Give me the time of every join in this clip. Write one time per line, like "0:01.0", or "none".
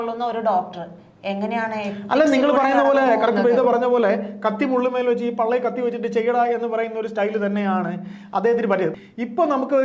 0:08.9